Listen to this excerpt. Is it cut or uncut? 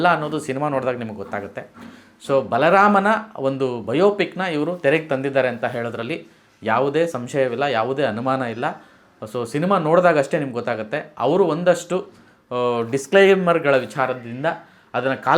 uncut